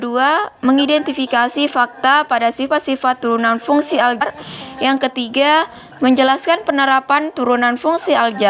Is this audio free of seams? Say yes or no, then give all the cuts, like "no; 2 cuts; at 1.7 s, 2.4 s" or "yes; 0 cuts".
no; 1 cut; at 4.2 s